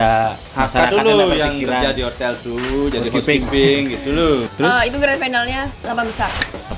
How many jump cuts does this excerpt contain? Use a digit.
1